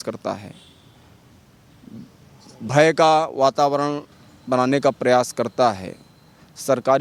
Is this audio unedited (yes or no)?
yes